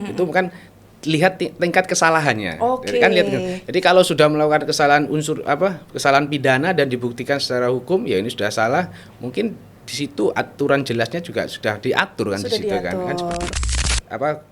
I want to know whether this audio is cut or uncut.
cut